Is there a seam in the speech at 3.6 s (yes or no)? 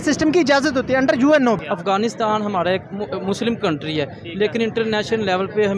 no